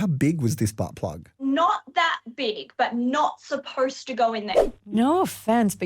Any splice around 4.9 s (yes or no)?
yes